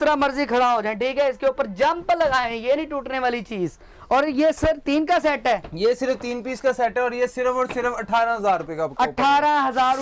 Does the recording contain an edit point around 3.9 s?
no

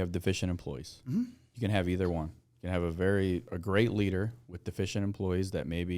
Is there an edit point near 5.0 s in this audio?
no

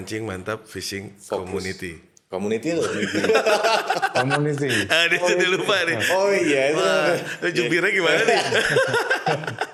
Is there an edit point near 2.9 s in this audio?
no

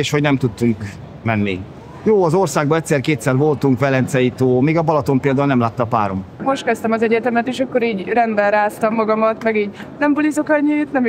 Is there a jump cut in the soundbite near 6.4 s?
yes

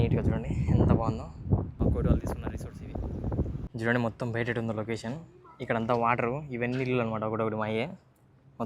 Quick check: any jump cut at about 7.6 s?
no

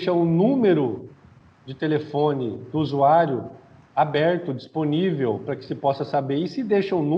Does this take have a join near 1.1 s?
no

